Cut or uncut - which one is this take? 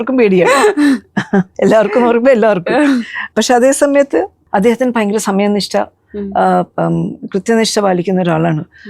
cut